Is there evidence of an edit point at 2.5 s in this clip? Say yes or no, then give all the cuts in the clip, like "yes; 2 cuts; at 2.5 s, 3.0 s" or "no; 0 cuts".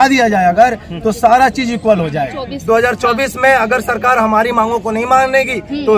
yes; 1 cut; at 2.5 s